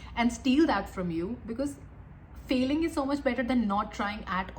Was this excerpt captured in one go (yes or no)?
yes